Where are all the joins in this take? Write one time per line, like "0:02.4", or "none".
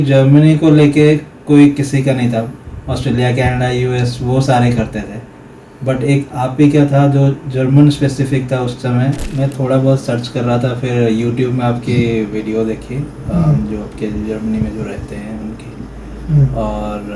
0:09.2